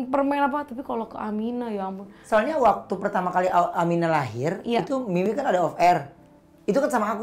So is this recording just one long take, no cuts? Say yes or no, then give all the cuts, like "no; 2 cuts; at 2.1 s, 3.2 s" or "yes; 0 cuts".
no; 1 cut; at 2.2 s